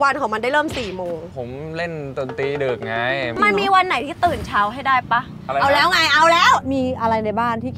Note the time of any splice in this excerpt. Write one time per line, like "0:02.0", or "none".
0:01.3
0:03.3
0:06.6